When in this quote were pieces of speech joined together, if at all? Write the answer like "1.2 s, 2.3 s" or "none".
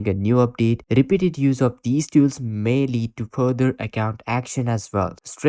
none